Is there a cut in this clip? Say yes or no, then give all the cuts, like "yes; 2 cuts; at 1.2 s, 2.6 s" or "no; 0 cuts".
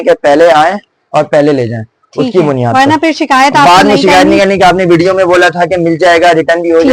no; 0 cuts